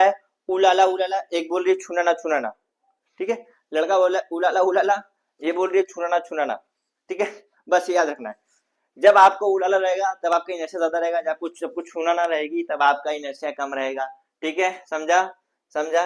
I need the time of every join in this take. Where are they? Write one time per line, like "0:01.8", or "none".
none